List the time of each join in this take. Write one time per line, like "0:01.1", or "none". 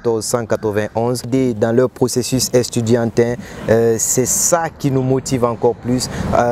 0:01.3